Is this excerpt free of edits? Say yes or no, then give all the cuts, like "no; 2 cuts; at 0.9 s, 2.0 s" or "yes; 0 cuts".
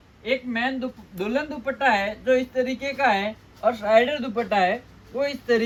yes; 0 cuts